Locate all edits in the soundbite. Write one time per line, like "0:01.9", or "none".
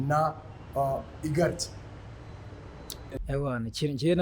0:02.9